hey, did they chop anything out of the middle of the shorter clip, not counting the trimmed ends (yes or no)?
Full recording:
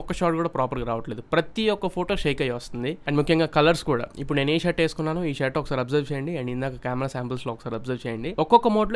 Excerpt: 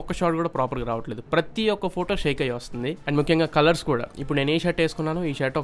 no